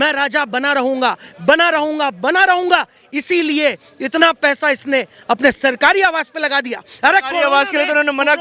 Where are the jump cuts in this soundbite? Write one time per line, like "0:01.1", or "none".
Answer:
none